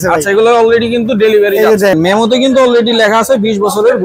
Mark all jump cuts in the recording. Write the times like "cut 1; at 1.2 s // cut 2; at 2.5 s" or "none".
cut 1; at 1.9 s